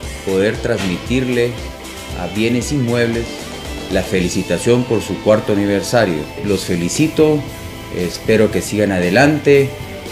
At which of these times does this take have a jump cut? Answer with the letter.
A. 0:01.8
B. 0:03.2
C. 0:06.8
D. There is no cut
D